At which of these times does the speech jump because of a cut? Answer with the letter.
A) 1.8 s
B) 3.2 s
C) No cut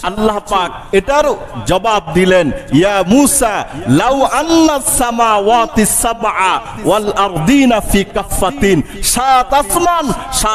C